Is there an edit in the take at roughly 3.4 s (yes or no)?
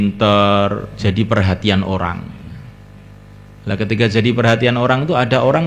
no